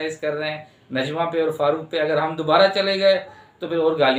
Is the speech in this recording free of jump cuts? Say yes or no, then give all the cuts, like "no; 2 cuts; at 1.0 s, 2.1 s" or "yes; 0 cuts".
yes; 0 cuts